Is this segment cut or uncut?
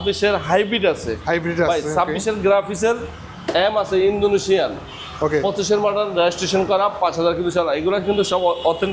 uncut